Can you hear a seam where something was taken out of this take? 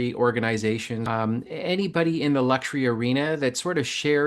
yes; 1 cut; at 1.0 s

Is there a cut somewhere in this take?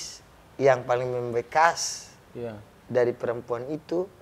no; 0 cuts

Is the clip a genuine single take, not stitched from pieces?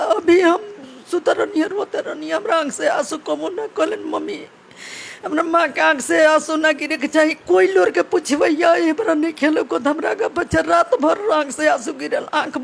yes; 0 cuts

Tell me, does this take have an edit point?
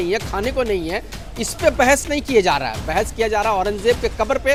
no; 0 cuts

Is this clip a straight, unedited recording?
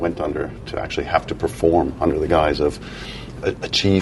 yes; 0 cuts

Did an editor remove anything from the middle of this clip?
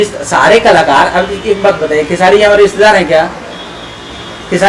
no; 0 cuts

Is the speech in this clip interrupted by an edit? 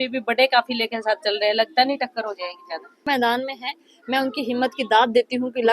yes; 1 cut; at 3.1 s

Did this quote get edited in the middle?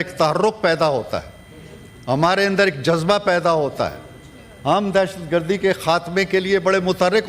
no; 0 cuts

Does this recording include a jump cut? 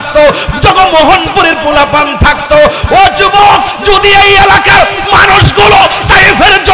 no; 0 cuts

